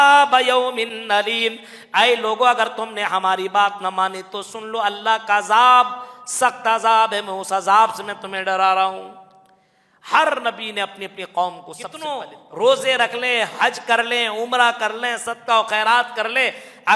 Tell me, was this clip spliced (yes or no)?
yes